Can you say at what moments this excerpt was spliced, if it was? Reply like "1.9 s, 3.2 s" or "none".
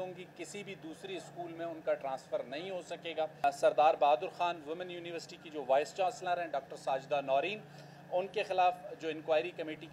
3.4 s